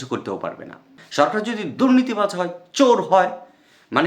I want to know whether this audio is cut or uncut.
cut